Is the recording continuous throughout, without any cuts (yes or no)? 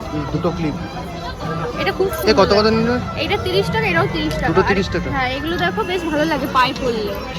yes